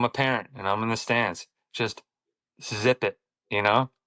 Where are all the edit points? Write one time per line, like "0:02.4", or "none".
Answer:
none